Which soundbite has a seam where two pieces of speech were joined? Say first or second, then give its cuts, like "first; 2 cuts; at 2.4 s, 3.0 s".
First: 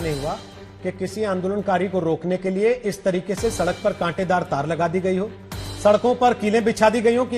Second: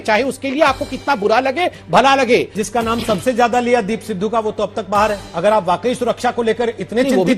second; 2 cuts; at 2.6 s, 5.3 s